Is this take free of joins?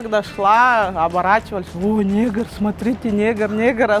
yes; 0 cuts

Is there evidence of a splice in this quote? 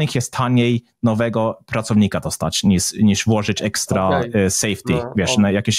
no; 0 cuts

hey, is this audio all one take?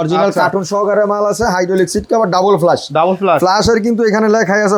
yes; 0 cuts

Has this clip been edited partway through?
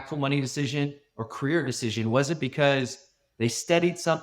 no; 0 cuts

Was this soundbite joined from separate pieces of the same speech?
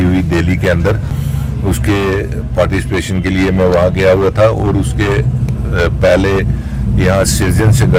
no; 0 cuts

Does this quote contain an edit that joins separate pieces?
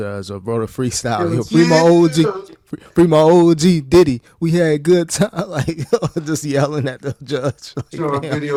no; 0 cuts

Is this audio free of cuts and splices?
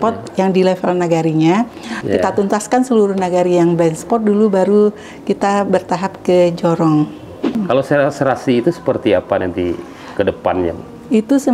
no; 2 cuts; at 1.9 s, 7.6 s

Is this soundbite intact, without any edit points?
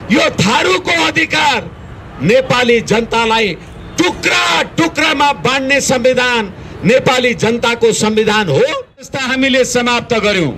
no; 1 cut; at 9.2 s

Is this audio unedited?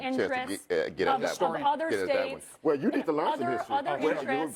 yes; 0 cuts

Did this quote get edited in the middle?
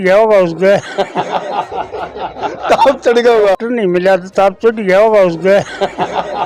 yes; 1 cut; at 3.5 s

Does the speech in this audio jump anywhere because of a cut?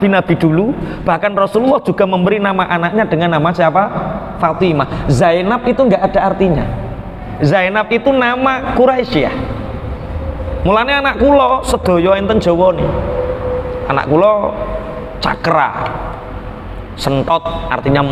no; 0 cuts

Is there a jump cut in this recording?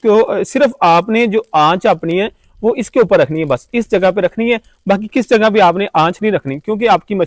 no; 0 cuts

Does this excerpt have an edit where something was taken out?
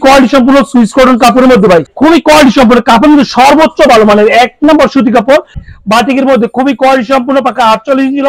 yes; 2 cuts; at 1.9 s, 5.6 s

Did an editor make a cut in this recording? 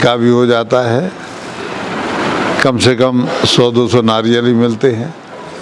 no; 0 cuts

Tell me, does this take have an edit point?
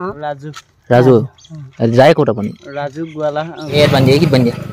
yes; 1 cut; at 3.7 s

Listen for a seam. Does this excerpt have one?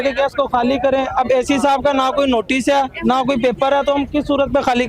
no; 0 cuts

